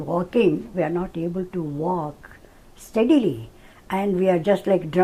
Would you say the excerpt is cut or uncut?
uncut